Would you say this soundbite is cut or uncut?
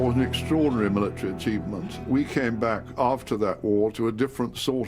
cut